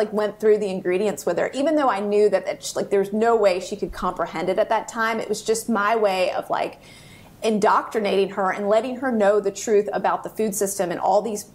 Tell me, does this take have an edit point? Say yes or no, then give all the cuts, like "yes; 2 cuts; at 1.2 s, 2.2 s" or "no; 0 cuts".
no; 0 cuts